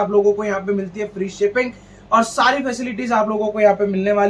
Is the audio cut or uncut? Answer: uncut